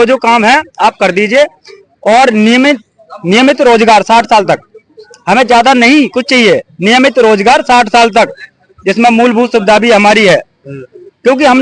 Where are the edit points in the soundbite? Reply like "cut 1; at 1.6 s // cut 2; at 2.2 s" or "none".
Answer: none